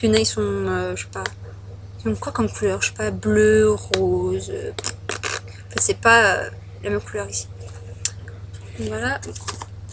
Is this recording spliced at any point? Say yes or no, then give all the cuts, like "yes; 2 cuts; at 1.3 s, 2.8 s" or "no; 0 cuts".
no; 0 cuts